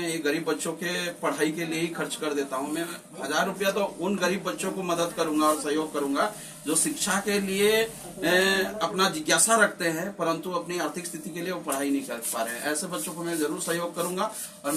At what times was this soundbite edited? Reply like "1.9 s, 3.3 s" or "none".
none